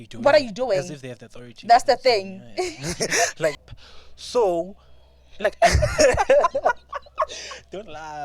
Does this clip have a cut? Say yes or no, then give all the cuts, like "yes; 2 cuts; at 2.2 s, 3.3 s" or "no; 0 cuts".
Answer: yes; 1 cut; at 3.7 s